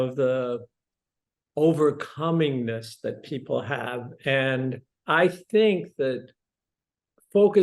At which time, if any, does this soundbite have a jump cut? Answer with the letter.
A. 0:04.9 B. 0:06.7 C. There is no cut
A